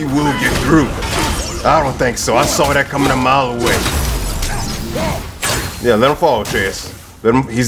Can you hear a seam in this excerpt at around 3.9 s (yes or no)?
yes